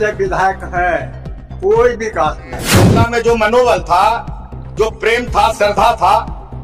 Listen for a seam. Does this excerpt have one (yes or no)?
yes